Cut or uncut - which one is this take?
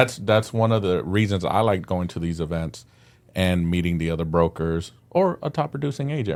uncut